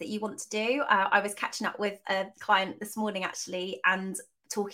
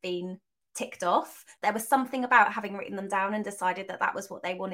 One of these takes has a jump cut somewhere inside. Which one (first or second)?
second